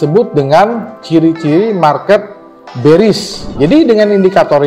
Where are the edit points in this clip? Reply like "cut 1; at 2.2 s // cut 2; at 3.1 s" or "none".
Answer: cut 1; at 3.5 s